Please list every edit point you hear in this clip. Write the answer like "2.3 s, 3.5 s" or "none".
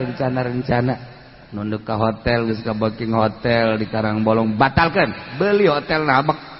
none